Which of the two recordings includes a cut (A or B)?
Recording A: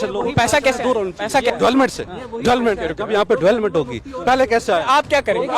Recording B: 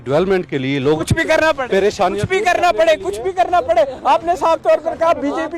A